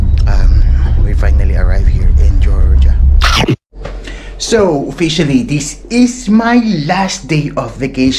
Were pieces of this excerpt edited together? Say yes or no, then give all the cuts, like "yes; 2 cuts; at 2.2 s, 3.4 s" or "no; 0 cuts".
yes; 1 cut; at 3.3 s